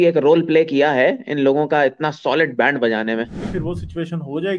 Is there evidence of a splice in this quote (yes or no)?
yes